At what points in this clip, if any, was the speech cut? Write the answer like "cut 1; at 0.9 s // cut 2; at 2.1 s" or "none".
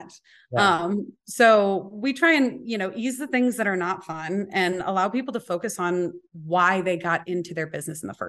none